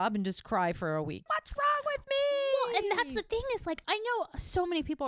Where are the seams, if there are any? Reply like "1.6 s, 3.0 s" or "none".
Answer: 1.2 s, 3.8 s